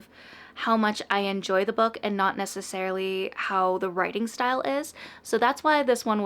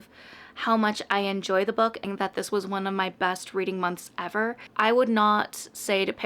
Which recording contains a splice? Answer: second; 2 cuts; at 2.0 s, 4.6 s

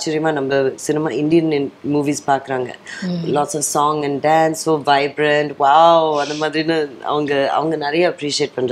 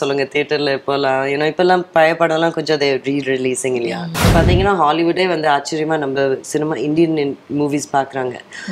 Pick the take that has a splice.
second; 1 cut; at 4.2 s

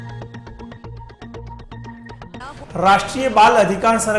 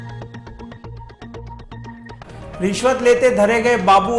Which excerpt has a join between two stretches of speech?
second; 1 cut; at 2.2 s

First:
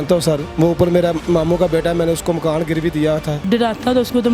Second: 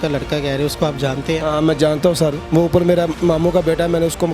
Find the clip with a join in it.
first; 1 cut; at 3.4 s

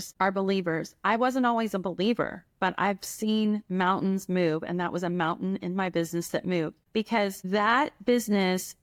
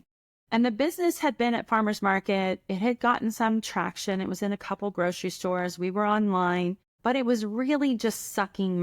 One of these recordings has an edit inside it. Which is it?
second; 1 cut; at 6.9 s

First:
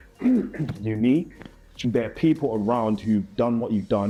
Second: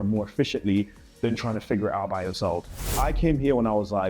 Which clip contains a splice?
second; 1 cut; at 3.0 s

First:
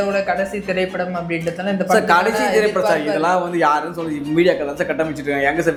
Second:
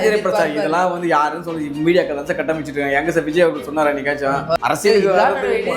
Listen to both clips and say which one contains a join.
second; 1 cut; at 4.6 s

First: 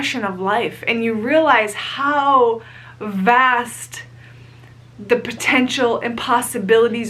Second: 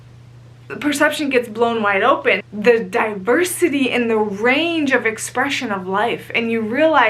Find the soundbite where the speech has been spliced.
second; 1 cut; at 2.4 s

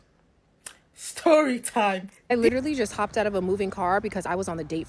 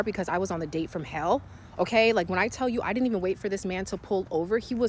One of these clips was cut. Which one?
first; 1 cut; at 2.1 s

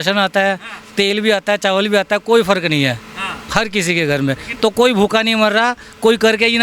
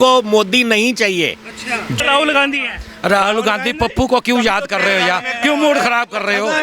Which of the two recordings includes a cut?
second; 1 cut; at 2.0 s

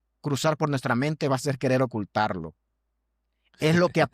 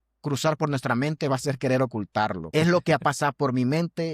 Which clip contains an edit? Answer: second; 1 cut; at 2.4 s

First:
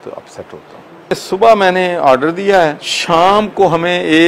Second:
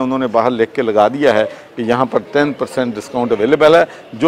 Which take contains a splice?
first; 2 cuts; at 1.2 s, 2.9 s

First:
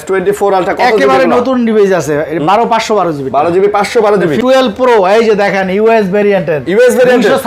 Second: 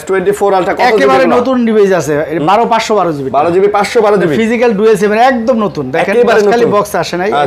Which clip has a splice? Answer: first; 1 cut; at 4.4 s

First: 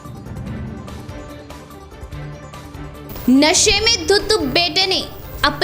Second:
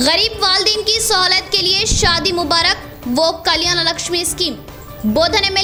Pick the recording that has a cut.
first; 1 cut; at 2.5 s

